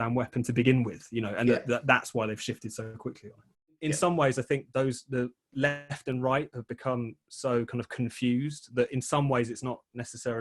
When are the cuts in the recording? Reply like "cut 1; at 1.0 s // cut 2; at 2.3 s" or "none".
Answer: cut 1; at 3.8 s